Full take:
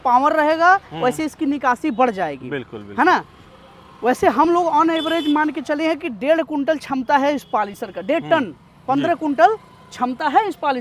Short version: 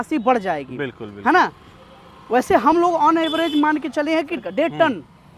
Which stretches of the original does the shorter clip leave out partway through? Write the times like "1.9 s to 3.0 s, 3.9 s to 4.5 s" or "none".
6.1 s to 7.9 s